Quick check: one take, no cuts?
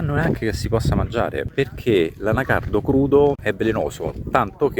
no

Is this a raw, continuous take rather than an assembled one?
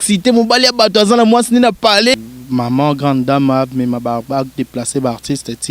no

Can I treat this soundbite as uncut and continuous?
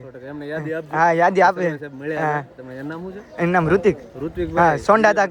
yes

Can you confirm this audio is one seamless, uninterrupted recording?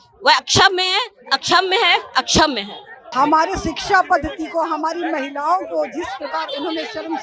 no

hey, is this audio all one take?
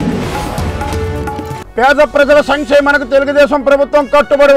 no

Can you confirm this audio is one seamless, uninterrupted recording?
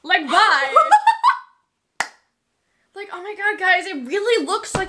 yes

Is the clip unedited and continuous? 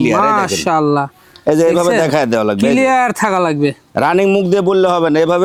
yes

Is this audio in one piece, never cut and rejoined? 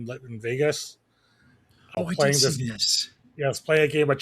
no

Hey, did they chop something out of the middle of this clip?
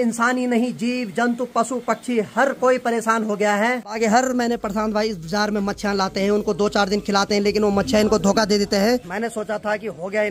yes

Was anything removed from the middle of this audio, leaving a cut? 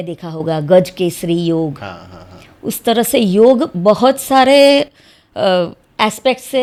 no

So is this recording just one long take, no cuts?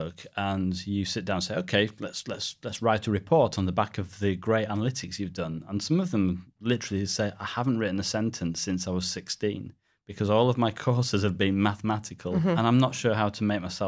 no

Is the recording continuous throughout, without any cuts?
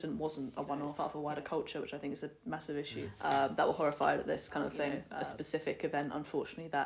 no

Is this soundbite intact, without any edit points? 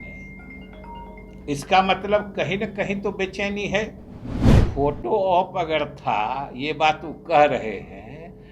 no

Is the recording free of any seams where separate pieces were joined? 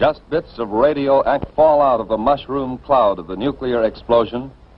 no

